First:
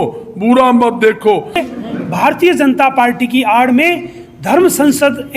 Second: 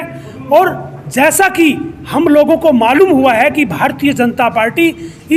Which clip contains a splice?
first; 1 cut; at 1.6 s

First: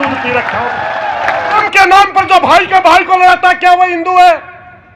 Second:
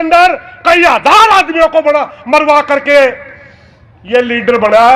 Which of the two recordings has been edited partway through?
first; 1 cut; at 1.6 s

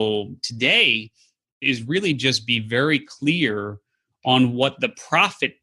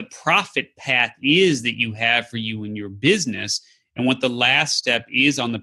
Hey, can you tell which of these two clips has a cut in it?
first; 1 cut; at 1.5 s

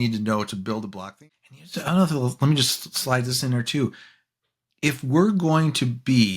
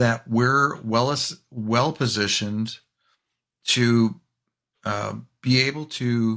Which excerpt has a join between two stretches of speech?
first; 1 cut; at 1.0 s

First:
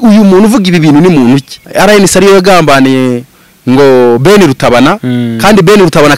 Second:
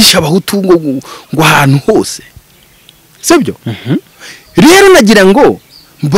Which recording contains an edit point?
first; 1 cut; at 1.6 s

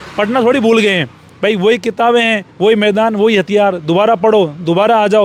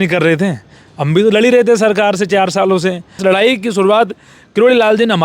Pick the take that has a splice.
second; 1 cut; at 3.1 s

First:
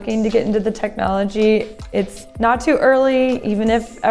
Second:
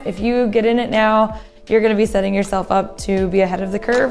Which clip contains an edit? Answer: first; 1 cut; at 2.2 s

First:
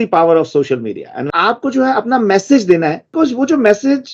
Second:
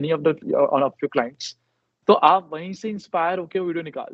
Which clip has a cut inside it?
first; 2 cuts; at 1.3 s, 3.0 s

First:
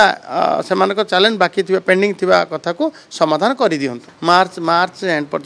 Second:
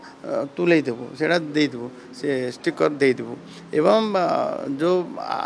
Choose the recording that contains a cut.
first; 1 cut; at 4.1 s

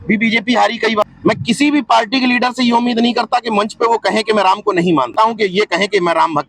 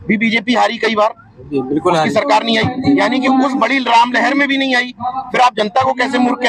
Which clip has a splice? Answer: first; 2 cuts; at 1.0 s, 5.1 s

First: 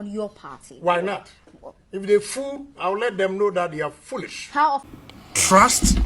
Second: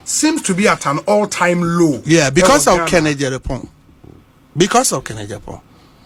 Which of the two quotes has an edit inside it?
first; 1 cut; at 4.9 s

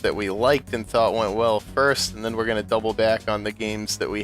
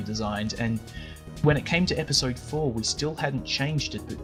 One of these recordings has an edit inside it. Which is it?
first; 1 cut; at 1.9 s

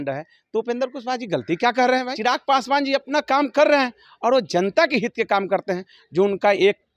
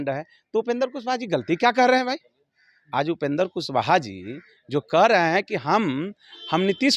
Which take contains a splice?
first; 1 cut; at 2.1 s

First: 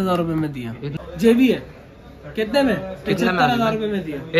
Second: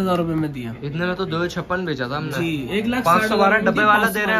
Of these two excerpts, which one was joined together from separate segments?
first; 1 cut; at 0.9 s

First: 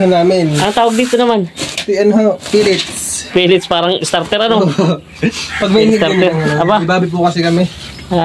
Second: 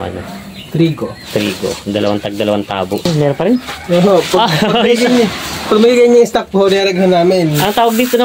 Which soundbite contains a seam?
second; 1 cut; at 3.1 s

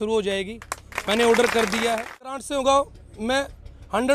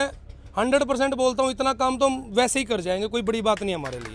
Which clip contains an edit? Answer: first; 1 cut; at 2.4 s

